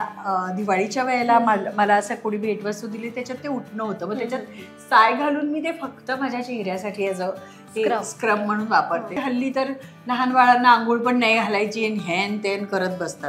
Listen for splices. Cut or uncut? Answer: cut